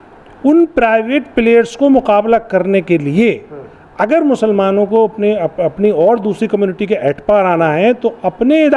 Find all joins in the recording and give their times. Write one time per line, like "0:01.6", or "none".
none